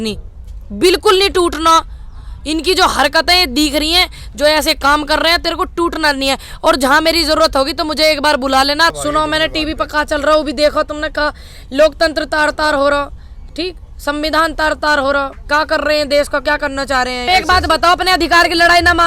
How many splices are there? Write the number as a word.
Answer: two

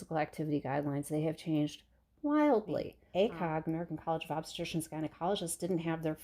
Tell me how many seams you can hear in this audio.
one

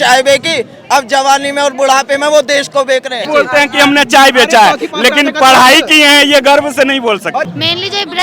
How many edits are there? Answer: two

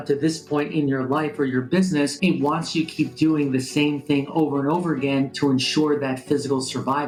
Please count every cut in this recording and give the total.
zero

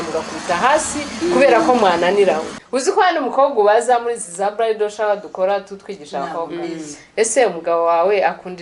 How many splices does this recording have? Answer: one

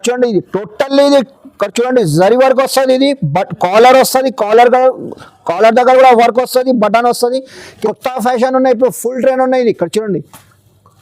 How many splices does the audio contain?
one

